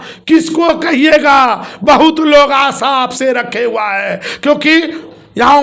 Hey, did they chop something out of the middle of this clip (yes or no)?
no